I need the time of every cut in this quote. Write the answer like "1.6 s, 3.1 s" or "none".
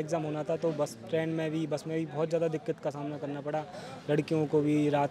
none